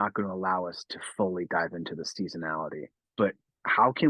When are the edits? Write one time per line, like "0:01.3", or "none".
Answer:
0:03.0